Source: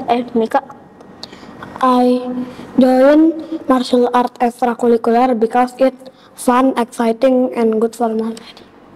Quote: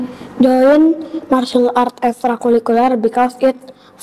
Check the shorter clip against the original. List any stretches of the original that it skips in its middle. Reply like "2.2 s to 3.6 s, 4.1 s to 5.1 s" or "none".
none